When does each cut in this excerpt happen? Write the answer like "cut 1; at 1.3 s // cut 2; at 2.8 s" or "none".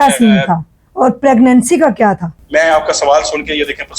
cut 1; at 2.3 s